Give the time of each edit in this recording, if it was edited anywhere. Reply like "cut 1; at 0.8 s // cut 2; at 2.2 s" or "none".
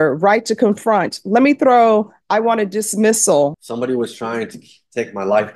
cut 1; at 3.6 s